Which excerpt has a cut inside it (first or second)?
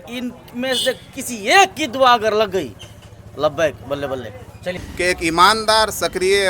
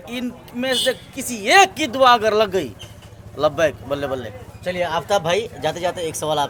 first